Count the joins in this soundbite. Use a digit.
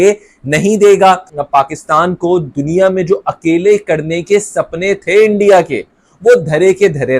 1